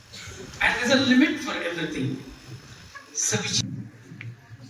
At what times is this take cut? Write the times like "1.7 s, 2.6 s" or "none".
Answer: 3.6 s